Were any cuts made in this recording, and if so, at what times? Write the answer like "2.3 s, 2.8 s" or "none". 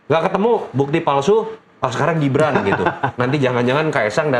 none